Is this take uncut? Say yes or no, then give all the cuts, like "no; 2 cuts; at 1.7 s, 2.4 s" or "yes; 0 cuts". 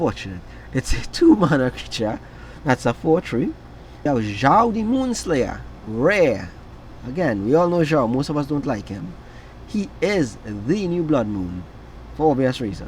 no; 1 cut; at 4.1 s